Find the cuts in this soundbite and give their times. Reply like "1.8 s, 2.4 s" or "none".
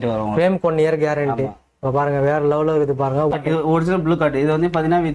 3.3 s